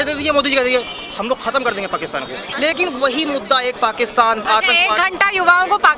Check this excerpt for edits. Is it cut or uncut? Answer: uncut